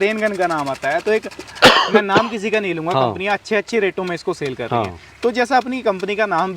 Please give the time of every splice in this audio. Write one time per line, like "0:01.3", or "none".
none